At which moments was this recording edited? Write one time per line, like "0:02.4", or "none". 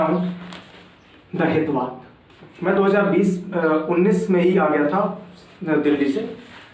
none